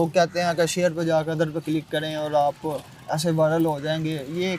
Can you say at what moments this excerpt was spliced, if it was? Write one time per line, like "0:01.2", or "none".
none

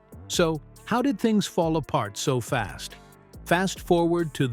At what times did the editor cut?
none

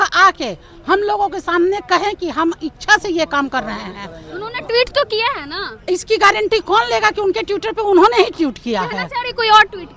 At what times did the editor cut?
none

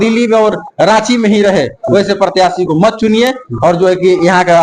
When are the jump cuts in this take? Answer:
none

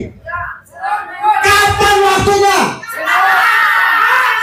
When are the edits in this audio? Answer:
none

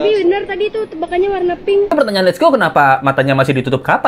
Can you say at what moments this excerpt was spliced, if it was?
0:01.9

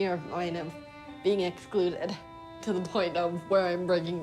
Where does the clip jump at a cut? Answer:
0:02.5

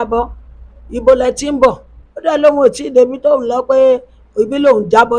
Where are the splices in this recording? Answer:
none

